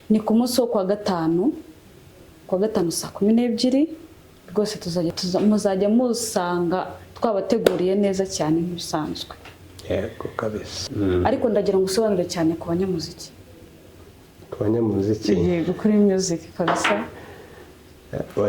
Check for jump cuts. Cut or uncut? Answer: cut